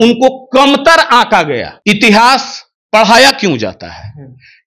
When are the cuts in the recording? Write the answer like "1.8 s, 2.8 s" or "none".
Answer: 1.7 s